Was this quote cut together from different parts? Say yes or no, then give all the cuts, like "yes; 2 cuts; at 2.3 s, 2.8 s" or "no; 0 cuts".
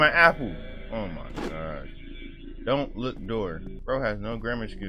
yes; 1 cut; at 3.7 s